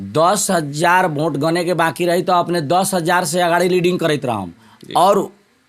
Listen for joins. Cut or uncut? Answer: uncut